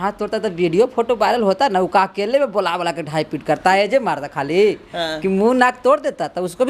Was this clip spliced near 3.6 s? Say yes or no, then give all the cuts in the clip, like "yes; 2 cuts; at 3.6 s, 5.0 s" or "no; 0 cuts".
no; 0 cuts